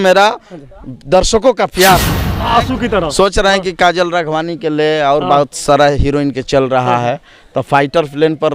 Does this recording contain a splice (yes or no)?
yes